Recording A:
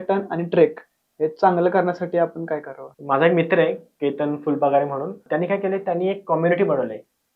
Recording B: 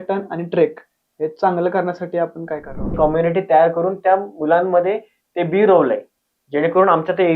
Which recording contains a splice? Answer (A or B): B